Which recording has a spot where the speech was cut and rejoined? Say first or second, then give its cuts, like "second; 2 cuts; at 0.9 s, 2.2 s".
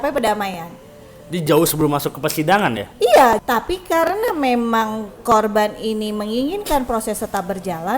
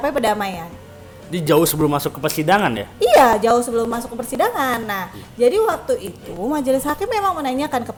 first; 1 cut; at 3.4 s